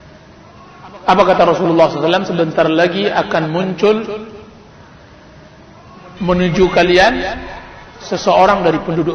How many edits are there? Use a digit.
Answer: 0